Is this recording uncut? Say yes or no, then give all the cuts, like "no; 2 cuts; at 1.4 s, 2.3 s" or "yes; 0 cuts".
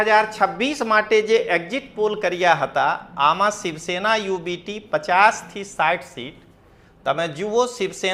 yes; 0 cuts